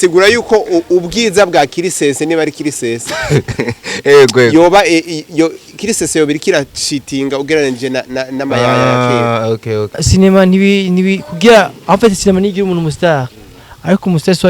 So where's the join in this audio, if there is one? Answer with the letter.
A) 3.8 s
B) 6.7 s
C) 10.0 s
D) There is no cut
C